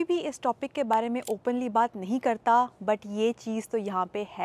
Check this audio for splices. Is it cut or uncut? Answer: uncut